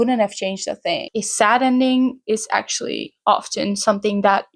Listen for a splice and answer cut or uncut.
uncut